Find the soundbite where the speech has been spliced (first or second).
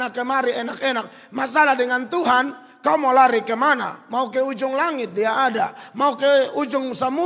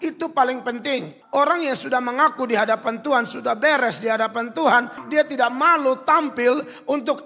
second